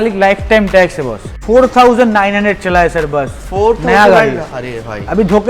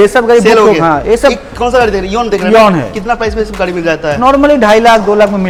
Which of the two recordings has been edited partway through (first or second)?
first